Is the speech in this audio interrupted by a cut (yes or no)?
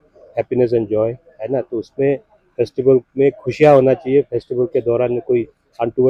no